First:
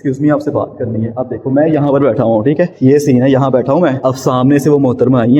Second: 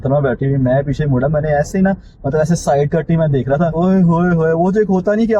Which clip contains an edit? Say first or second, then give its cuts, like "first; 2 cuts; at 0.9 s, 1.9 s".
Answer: first; 2 cuts; at 2.7 s, 4.0 s